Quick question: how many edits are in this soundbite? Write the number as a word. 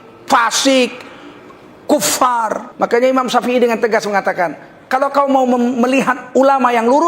one